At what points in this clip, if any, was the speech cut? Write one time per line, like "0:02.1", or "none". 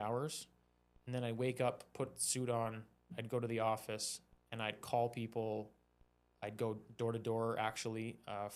none

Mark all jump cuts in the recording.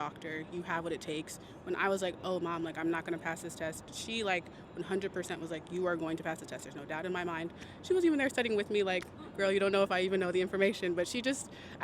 none

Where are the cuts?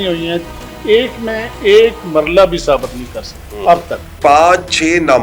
0:04.2

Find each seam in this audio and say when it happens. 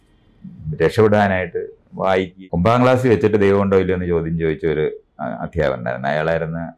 0:02.4

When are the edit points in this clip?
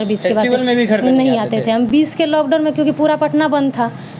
none

